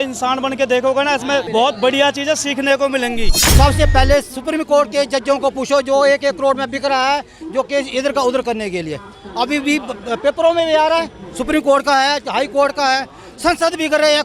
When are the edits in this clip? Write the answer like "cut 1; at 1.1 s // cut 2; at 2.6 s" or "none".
cut 1; at 1.5 s // cut 2; at 3.4 s